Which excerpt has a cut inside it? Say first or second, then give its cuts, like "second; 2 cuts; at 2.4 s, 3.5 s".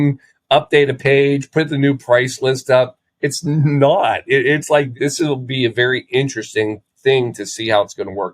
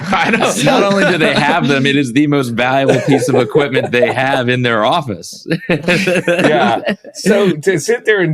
first; 1 cut; at 4.9 s